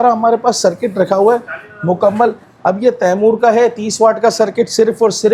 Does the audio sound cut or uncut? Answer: uncut